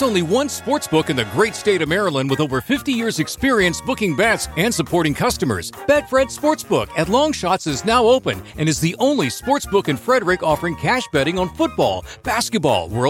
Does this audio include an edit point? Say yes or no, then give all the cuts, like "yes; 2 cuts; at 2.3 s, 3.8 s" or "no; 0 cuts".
no; 0 cuts